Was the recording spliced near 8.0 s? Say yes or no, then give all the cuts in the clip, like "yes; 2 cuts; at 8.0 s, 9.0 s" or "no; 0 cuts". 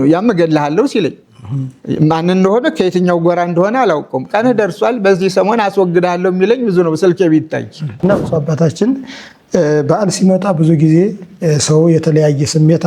yes; 1 cut; at 8.0 s